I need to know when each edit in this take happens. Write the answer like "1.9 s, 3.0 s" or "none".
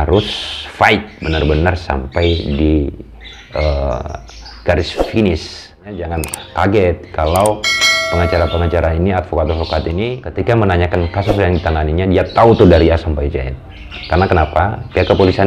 6.1 s, 10.2 s